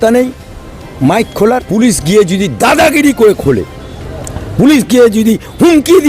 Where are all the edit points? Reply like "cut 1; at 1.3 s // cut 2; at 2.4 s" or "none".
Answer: cut 1; at 1.7 s